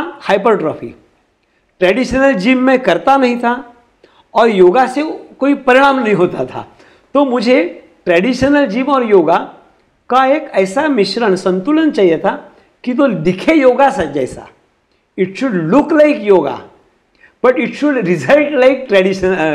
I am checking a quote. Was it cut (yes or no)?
no